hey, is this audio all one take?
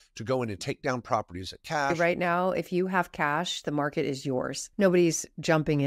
no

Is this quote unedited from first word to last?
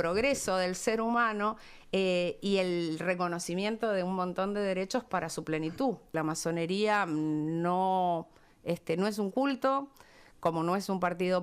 no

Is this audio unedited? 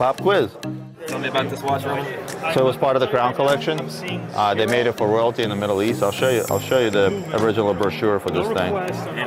no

